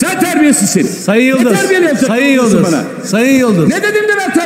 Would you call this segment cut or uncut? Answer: uncut